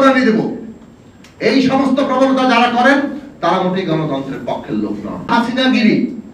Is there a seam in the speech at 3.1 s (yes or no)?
no